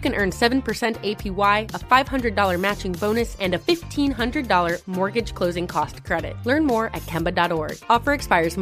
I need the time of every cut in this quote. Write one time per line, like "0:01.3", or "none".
none